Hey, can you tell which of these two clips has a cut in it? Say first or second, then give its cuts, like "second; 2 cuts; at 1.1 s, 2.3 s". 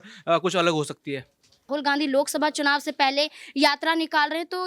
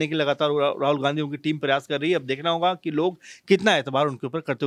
first; 1 cut; at 1.5 s